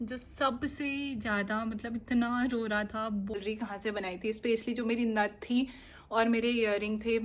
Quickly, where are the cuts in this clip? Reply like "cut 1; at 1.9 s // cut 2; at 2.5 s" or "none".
cut 1; at 3.4 s

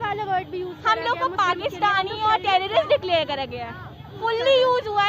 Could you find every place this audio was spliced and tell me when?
cut 1; at 4.1 s

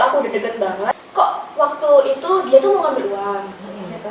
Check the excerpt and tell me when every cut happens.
cut 1; at 0.9 s

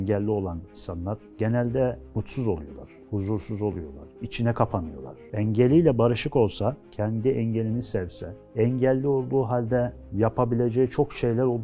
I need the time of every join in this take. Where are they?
cut 1; at 5.3 s // cut 2; at 6.9 s

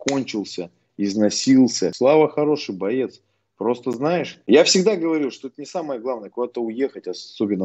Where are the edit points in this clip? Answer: cut 1; at 1.9 s // cut 2; at 4.4 s

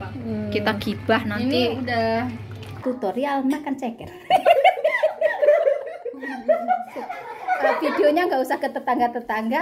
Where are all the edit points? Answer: cut 1; at 2.7 s

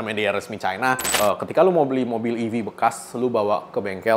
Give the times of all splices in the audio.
cut 1; at 1.1 s

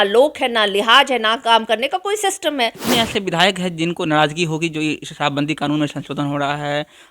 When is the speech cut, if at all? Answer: cut 1; at 2.8 s

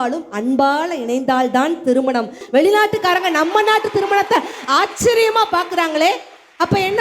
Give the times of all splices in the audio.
cut 1; at 2.4 s

